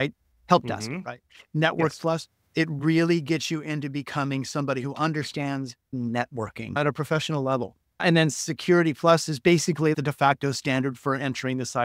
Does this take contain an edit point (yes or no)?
yes